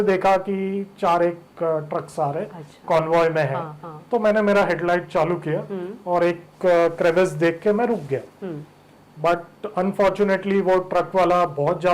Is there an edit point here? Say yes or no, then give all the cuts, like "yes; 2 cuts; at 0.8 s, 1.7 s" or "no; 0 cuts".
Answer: no; 0 cuts